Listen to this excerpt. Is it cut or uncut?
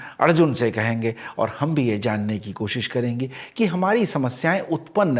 uncut